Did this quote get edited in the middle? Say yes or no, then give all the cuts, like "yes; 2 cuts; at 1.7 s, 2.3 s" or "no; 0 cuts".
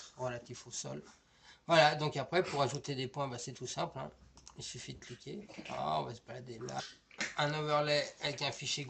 no; 0 cuts